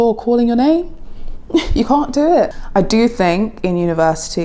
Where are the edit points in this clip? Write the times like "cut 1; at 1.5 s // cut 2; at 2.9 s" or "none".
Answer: cut 1; at 2.6 s